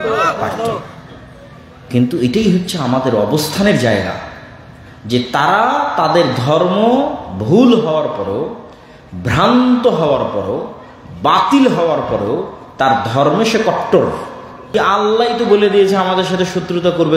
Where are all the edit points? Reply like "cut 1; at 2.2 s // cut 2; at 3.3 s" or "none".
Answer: cut 1; at 14.7 s